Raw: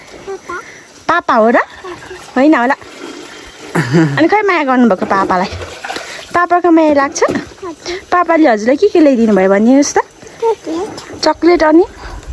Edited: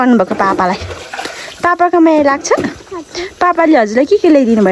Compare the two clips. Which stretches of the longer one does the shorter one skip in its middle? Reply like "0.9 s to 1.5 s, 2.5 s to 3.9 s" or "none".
none